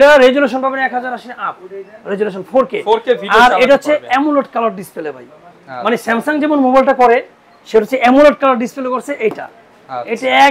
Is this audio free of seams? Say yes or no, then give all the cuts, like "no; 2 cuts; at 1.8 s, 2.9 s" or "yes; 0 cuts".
yes; 0 cuts